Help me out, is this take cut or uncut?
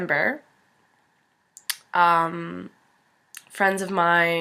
cut